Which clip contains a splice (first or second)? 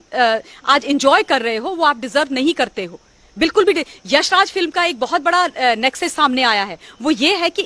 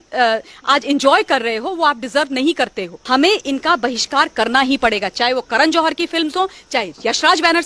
second